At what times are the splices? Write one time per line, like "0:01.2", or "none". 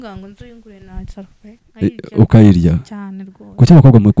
none